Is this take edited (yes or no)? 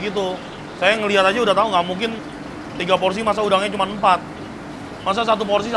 no